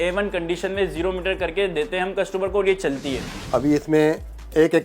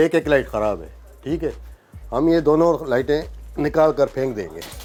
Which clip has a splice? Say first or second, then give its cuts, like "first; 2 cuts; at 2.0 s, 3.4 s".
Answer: first; 1 cut; at 3.3 s